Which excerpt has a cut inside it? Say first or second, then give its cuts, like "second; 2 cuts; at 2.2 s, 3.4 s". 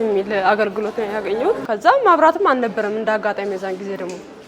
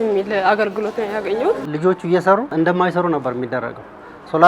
second; 2 cuts; at 1.6 s, 2.5 s